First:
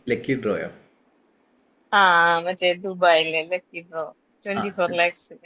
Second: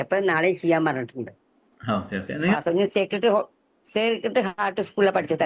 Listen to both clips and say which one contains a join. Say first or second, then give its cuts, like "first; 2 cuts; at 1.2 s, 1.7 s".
second; 1 cut; at 2.5 s